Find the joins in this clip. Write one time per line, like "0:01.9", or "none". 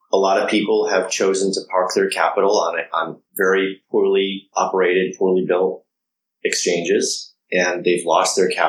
0:03.2
0:04.5